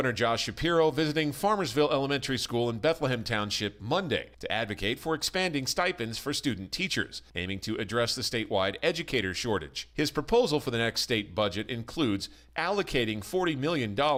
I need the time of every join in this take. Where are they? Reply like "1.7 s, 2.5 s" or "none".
none